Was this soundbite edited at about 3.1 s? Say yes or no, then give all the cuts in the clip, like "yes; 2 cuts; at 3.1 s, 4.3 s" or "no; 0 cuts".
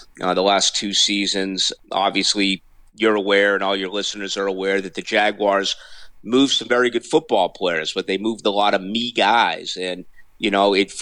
no; 1 cut; at 1.7 s